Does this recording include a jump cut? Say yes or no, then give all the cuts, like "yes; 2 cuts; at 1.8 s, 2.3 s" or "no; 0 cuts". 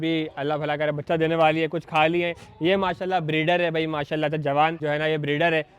yes; 1 cut; at 4.8 s